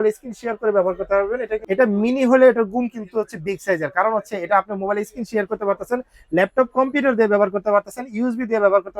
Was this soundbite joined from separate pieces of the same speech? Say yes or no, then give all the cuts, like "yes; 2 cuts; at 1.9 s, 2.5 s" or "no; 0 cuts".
yes; 1 cut; at 1.6 s